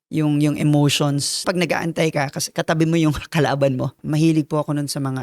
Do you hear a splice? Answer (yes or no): yes